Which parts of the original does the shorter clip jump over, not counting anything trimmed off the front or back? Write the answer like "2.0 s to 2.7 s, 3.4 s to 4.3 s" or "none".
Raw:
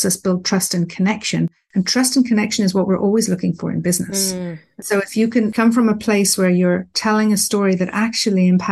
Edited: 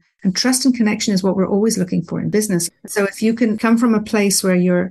3.8 s to 4.3 s